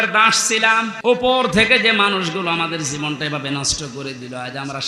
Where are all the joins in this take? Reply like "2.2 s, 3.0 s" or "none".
0.9 s